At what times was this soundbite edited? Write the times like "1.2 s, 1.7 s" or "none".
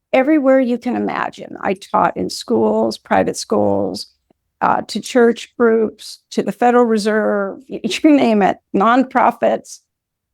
none